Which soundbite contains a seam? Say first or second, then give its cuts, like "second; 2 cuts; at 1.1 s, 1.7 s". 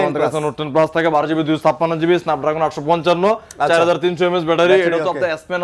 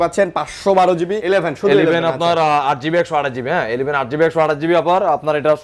second; 1 cut; at 1.2 s